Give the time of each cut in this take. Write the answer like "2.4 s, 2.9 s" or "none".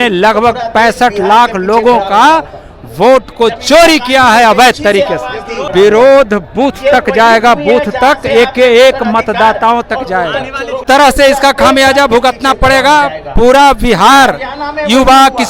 5.7 s, 10.8 s